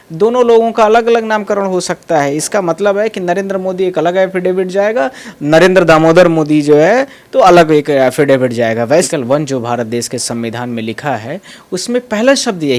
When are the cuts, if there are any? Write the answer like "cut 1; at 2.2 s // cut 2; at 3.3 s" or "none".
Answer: cut 1; at 9.1 s